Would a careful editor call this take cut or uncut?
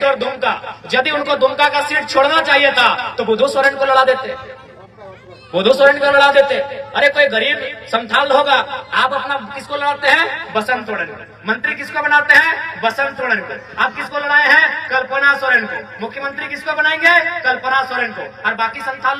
uncut